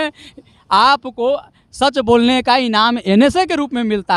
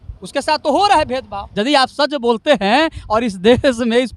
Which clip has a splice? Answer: second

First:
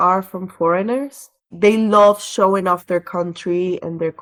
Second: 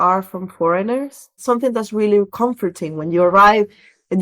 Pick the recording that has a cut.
second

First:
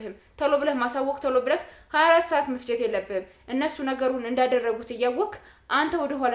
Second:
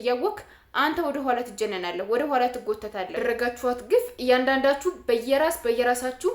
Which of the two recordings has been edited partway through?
second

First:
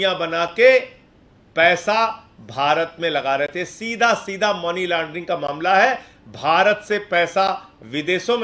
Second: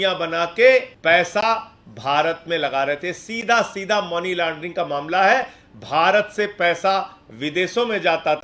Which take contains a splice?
second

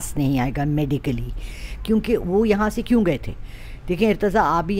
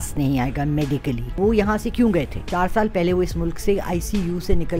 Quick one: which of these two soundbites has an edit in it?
second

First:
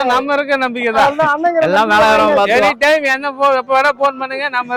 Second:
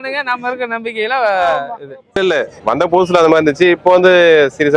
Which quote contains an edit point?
second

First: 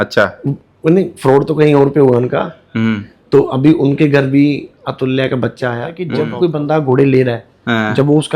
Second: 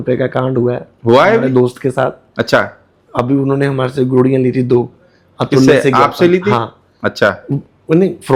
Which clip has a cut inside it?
first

